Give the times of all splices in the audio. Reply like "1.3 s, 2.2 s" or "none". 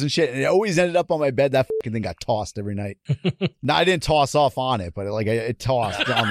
3.0 s